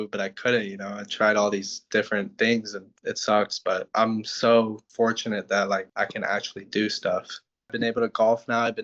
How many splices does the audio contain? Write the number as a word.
one